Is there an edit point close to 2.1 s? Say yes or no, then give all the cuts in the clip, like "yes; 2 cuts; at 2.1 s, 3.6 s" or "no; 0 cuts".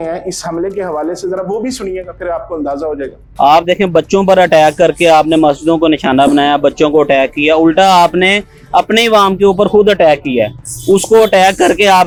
no; 0 cuts